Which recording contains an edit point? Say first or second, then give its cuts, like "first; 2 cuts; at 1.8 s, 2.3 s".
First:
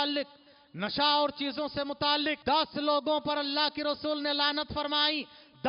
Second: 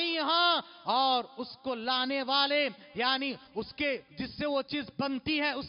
first; 1 cut; at 2.4 s